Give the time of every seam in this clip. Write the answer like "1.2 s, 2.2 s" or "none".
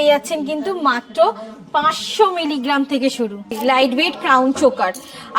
3.5 s

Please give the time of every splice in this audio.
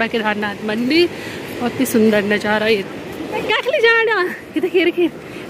none

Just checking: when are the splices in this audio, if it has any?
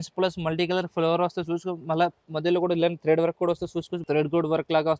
4.0 s

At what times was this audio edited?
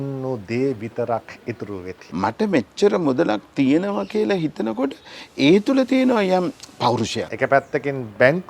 2.0 s, 7.2 s

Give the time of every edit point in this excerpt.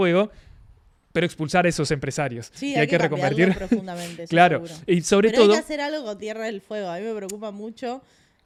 none

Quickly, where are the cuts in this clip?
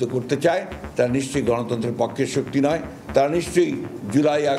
none

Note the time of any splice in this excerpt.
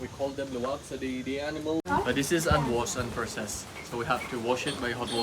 1.9 s

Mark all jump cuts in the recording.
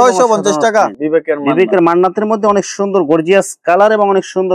0.9 s

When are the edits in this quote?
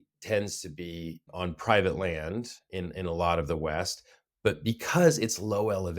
1.3 s

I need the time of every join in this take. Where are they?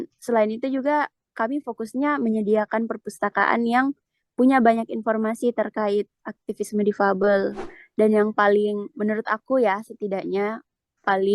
7.6 s

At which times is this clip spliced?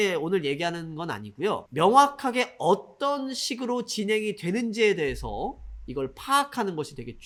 none

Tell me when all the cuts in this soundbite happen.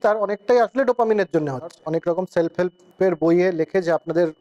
1.8 s, 2.8 s

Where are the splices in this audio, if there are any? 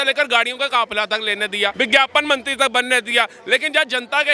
1.7 s

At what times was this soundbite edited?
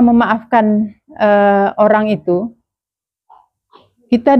none

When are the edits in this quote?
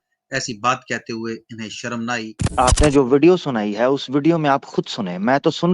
2.4 s

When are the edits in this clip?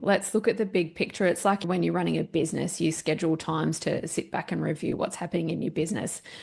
1.6 s

